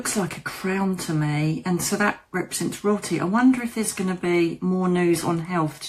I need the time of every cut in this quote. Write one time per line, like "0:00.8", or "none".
none